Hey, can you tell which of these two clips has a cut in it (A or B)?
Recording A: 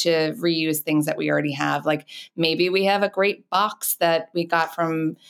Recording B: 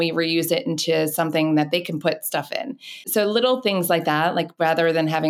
B